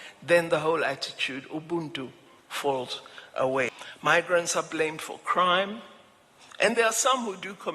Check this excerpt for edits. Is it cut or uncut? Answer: cut